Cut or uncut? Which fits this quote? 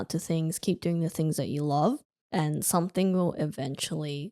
cut